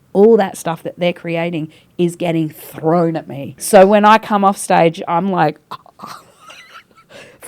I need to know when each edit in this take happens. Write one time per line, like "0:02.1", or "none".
0:03.6